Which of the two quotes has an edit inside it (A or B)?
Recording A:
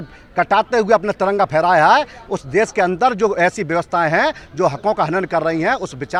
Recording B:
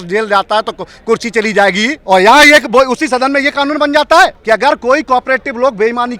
B